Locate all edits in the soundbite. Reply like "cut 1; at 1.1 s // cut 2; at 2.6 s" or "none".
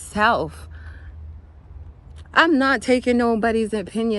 cut 1; at 2.2 s